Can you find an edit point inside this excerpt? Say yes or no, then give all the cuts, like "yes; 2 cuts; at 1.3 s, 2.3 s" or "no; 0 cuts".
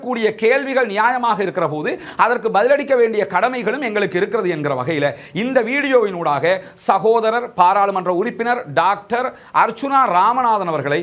no; 0 cuts